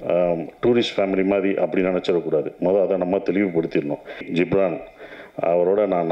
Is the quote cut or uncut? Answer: cut